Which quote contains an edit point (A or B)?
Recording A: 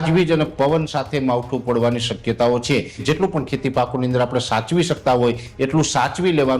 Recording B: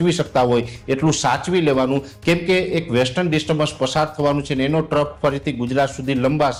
A